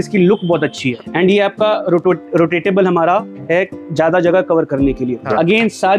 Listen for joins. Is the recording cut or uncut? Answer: cut